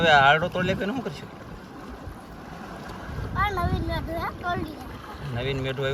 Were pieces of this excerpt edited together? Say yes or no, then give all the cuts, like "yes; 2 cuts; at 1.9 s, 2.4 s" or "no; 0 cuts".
no; 0 cuts